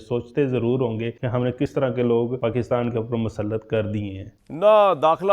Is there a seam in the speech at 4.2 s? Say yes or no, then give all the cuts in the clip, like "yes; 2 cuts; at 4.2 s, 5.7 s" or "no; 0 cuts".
yes; 1 cut; at 4.2 s